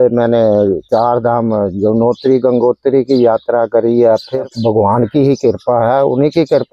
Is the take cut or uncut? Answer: cut